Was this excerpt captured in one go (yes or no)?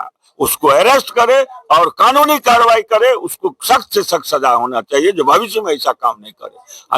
yes